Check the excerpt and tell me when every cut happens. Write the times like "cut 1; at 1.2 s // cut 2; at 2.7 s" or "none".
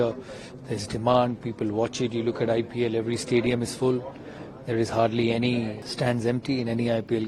cut 1; at 5.8 s